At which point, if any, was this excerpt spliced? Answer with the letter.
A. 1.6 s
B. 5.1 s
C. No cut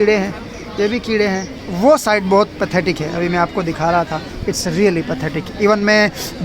A